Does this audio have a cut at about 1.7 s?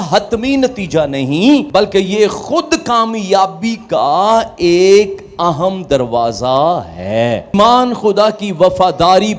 yes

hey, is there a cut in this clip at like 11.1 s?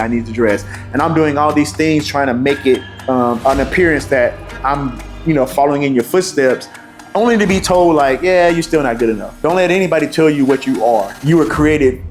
yes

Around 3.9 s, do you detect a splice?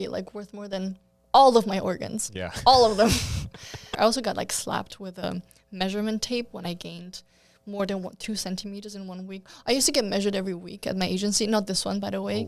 yes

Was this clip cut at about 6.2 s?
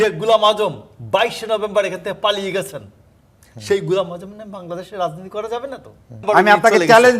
yes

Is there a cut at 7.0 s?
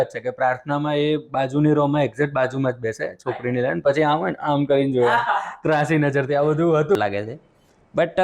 yes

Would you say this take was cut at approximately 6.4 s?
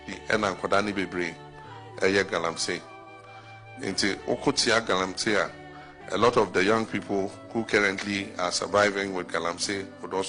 no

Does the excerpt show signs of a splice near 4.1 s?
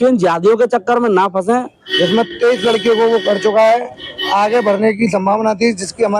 no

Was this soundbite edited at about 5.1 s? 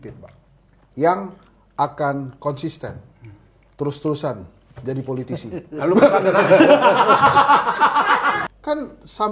no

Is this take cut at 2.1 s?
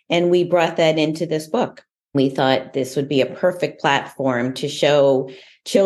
yes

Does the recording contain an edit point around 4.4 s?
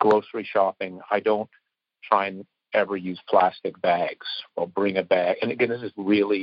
yes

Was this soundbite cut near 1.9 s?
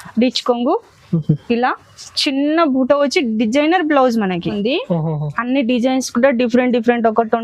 no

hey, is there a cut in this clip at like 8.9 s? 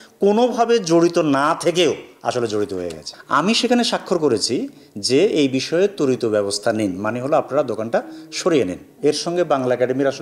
yes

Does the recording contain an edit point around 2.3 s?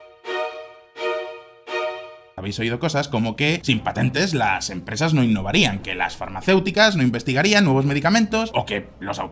yes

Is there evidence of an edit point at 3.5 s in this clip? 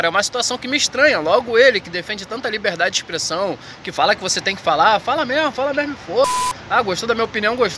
no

